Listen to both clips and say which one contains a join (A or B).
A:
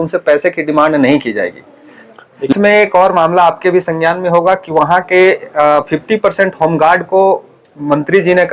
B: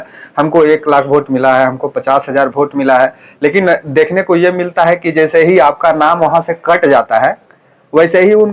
A